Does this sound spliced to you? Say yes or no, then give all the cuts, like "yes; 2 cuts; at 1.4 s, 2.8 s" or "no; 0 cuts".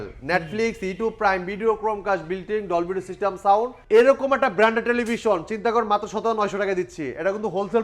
yes; 1 cut; at 3.8 s